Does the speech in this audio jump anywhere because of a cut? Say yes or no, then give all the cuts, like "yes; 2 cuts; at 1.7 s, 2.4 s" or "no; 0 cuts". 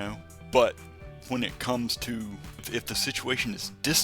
yes; 1 cut; at 2.7 s